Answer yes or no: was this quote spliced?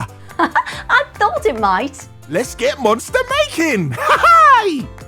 no